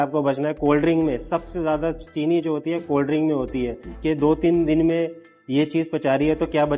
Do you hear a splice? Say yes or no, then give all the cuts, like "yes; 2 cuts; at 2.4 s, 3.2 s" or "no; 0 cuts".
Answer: yes; 1 cut; at 3.9 s